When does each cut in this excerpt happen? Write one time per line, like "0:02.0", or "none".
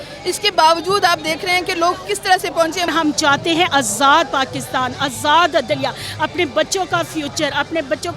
0:02.9